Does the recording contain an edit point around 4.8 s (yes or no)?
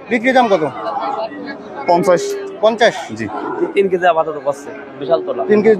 no